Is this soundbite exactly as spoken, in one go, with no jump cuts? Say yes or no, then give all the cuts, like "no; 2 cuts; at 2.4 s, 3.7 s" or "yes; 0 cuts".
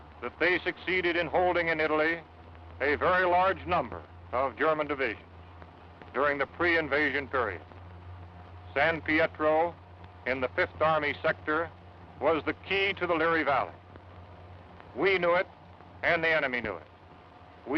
yes; 0 cuts